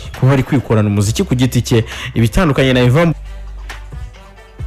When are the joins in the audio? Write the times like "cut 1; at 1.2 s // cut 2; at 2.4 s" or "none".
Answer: none